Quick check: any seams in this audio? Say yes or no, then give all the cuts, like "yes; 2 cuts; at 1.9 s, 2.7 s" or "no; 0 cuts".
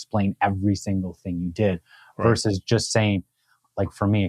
no; 0 cuts